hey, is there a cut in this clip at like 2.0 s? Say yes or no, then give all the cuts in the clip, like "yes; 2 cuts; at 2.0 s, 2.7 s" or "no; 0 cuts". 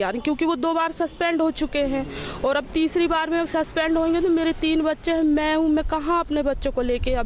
no; 0 cuts